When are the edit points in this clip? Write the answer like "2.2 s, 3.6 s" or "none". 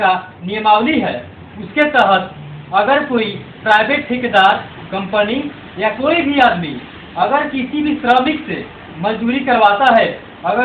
none